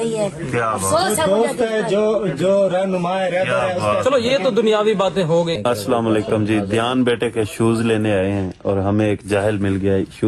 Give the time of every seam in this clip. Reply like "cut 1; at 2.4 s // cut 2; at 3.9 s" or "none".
cut 1; at 5.6 s